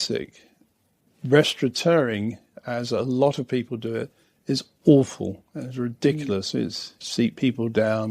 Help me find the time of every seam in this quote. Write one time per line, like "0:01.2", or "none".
0:01.1
0:07.0